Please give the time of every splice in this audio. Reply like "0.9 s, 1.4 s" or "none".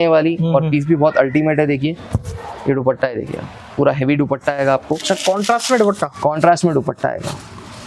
5.0 s